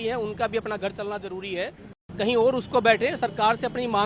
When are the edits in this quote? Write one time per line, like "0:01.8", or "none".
0:01.9